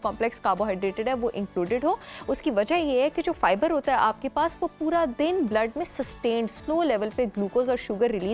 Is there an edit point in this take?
no; 0 cuts

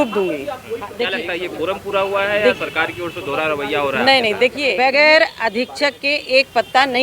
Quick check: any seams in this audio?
yes; 2 cuts; at 0.9 s, 4.7 s

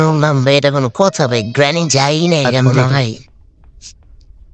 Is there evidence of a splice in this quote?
yes; 1 cut; at 2.8 s

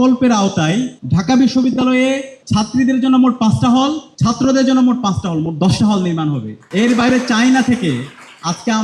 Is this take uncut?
no; 4 cuts; at 1.0 s, 2.3 s, 4.1 s, 6.5 s

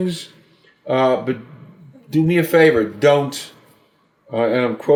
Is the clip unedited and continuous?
yes; 0 cuts

